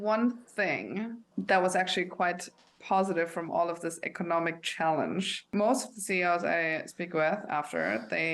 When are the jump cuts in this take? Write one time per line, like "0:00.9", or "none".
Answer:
0:01.2
0:05.5